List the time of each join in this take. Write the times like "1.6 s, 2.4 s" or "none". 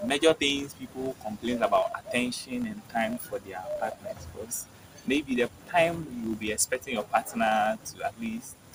none